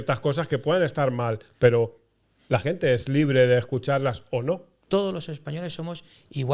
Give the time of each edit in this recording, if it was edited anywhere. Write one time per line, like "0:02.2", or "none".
0:04.7